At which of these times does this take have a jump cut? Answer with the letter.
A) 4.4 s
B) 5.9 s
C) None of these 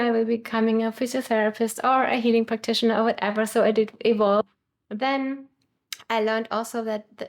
A